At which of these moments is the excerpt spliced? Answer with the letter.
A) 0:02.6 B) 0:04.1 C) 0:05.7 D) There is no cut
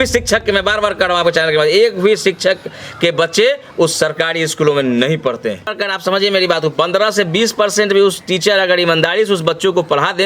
C